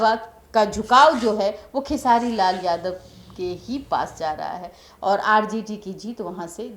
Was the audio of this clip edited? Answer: no; 0 cuts

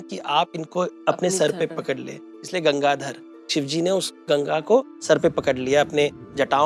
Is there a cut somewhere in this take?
no; 0 cuts

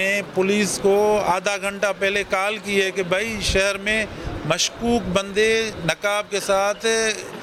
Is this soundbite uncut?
yes; 0 cuts

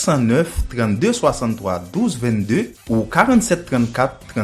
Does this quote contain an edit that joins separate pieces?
no; 0 cuts

